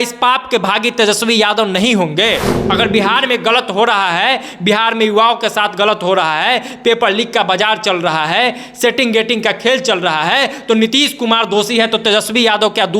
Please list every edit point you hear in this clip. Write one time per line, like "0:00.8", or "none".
0:02.6